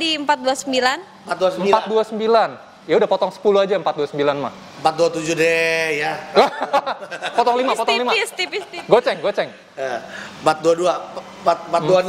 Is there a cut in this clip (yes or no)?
no